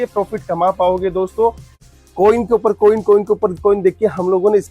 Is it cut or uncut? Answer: cut